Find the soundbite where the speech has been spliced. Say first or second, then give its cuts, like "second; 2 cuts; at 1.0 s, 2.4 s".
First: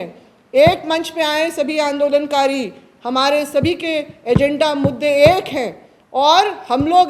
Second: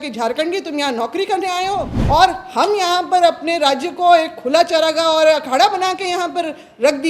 second; 1 cut; at 1.9 s